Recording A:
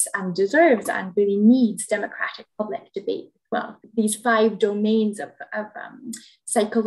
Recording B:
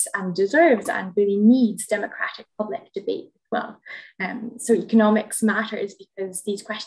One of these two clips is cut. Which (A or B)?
A